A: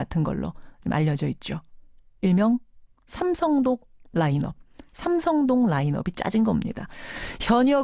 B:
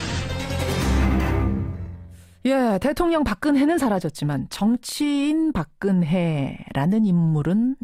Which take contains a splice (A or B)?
A